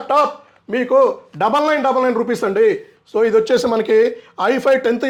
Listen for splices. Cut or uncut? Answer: uncut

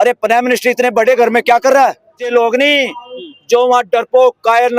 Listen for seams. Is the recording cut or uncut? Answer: cut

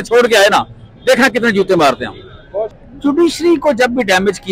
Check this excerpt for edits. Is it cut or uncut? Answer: cut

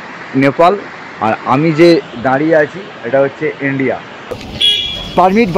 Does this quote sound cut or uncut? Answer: cut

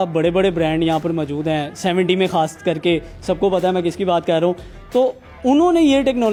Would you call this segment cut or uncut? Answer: uncut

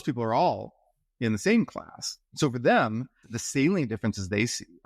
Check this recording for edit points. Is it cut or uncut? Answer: cut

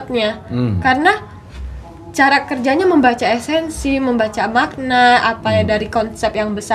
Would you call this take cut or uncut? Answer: uncut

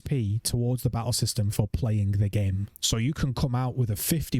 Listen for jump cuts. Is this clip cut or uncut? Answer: cut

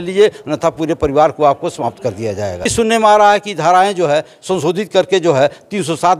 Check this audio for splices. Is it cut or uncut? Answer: cut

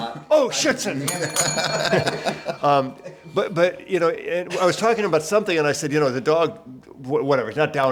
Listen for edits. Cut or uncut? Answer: uncut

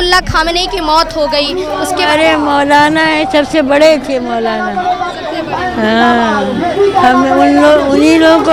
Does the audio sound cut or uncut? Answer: uncut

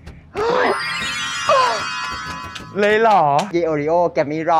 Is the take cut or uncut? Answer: cut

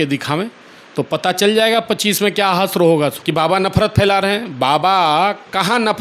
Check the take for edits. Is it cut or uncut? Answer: cut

